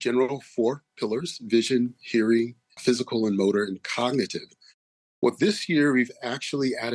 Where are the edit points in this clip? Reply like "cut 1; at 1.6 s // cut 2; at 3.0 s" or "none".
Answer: cut 1; at 2.6 s